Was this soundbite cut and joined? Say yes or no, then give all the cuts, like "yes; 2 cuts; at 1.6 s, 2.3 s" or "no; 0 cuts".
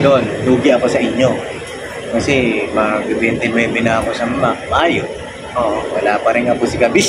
no; 0 cuts